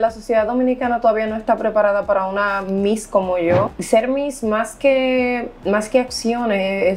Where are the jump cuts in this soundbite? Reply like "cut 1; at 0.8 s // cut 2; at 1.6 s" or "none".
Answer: cut 1; at 3.8 s